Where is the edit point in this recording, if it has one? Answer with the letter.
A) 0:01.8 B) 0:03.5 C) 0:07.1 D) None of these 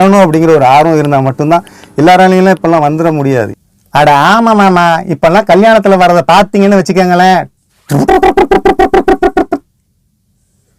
B